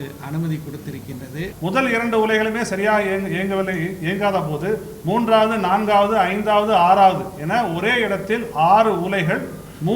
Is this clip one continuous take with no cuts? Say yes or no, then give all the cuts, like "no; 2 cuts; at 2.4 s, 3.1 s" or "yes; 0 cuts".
no; 1 cut; at 1.5 s